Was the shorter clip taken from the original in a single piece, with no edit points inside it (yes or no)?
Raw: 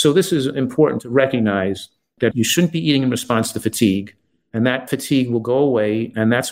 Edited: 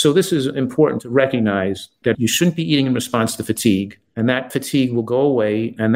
no